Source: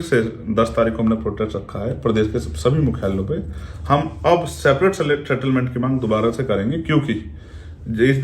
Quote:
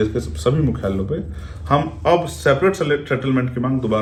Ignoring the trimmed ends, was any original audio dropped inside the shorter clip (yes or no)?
no